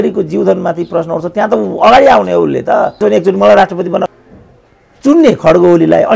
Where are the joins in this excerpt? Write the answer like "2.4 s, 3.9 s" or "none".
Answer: 2.9 s, 4.1 s